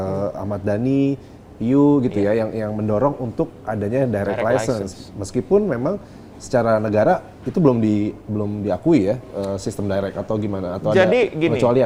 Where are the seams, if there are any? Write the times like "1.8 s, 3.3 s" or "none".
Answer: none